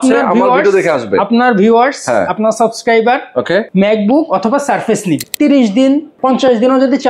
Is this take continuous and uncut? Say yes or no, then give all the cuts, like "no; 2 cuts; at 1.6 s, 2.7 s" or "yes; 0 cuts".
no; 3 cuts; at 3.7 s, 5.2 s, 6.1 s